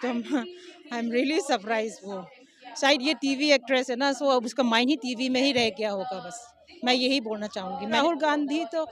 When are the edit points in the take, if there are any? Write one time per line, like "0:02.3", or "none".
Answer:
0:08.0

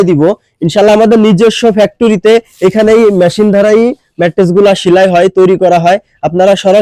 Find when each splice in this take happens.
none

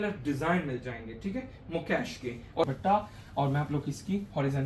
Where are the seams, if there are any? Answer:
0:02.6

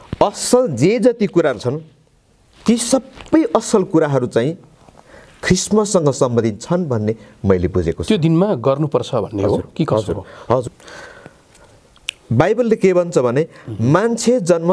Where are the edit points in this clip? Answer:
0:10.6

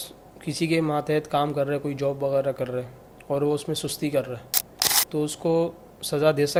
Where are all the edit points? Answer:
none

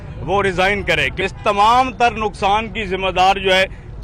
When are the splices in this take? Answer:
0:01.1

